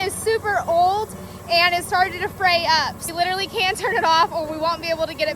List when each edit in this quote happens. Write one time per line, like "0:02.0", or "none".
0:03.1